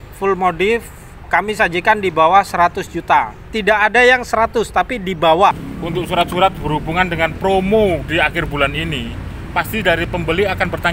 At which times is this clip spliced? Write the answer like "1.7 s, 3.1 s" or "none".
5.7 s